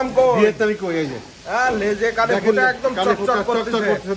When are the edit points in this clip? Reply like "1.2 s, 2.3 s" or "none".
none